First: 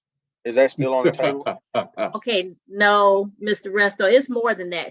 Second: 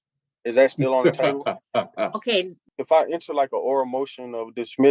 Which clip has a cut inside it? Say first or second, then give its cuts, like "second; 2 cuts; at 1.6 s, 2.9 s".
second; 1 cut; at 2.6 s